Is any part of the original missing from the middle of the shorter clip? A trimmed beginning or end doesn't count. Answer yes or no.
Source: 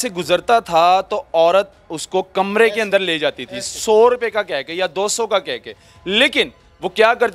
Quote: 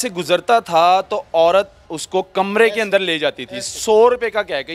no